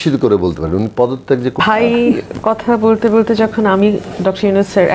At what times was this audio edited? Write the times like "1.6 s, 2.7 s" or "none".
1.6 s